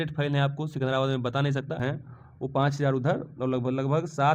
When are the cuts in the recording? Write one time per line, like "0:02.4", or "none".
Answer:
0:01.8